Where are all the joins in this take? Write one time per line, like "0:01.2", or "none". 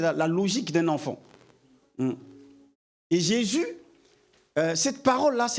none

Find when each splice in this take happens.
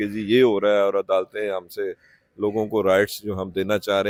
none

